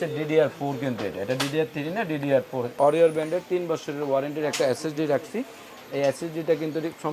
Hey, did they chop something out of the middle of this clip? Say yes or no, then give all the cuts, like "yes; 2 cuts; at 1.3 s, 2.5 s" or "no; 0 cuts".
yes; 1 cut; at 2.7 s